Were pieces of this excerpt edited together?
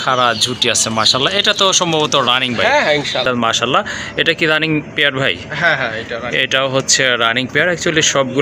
yes; 1 cut; at 3.2 s

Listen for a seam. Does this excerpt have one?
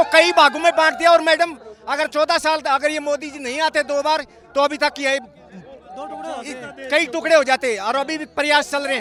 no; 0 cuts

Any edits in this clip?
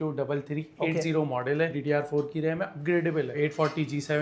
yes; 2 cuts; at 1.8 s, 3.4 s

